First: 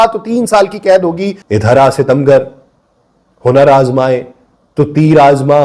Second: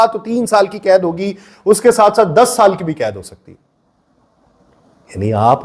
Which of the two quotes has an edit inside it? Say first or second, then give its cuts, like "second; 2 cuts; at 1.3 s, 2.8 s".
first; 1 cut; at 1.3 s